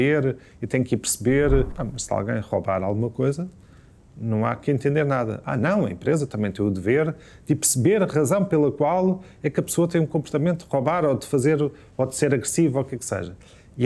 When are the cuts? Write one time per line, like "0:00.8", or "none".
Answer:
0:01.8

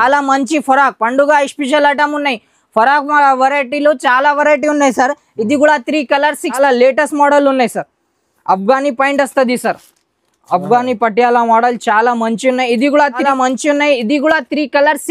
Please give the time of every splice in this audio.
0:06.6
0:13.2

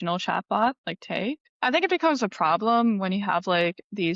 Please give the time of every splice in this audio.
0:01.5

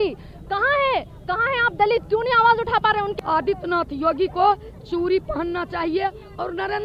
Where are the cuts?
0:03.1

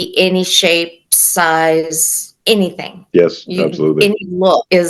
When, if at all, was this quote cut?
none

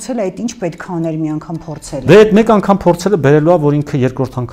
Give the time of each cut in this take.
none

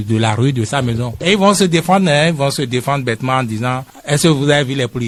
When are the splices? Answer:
none

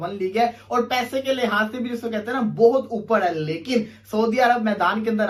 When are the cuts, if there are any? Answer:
none

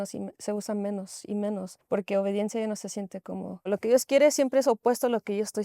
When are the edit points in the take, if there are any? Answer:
0:01.7
0:03.7

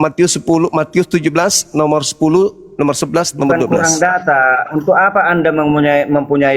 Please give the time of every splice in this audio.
none

